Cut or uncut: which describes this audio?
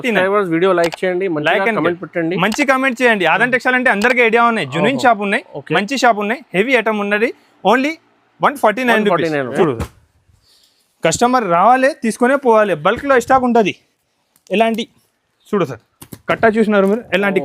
cut